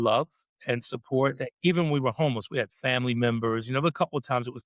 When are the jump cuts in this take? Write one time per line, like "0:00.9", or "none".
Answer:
none